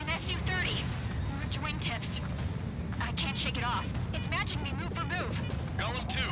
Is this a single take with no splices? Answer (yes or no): yes